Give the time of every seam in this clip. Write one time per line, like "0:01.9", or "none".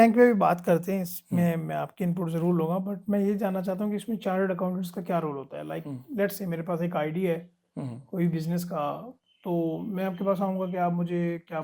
none